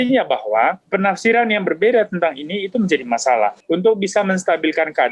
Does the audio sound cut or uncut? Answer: cut